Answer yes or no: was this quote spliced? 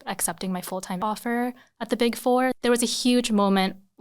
yes